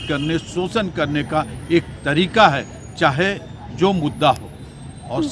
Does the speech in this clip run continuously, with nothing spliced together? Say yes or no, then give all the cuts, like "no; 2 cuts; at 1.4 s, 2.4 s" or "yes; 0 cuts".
yes; 0 cuts